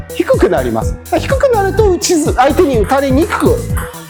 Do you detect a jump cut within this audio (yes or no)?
no